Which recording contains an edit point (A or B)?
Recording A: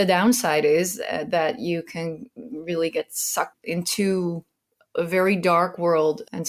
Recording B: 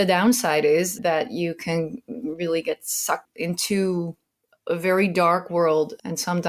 B